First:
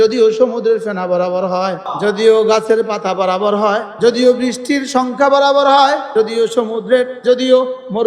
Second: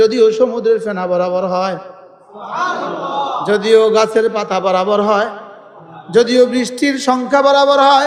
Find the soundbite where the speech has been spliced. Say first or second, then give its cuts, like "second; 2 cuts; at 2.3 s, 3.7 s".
first; 4 cuts; at 1.9 s, 3.9 s, 6.1 s, 7.2 s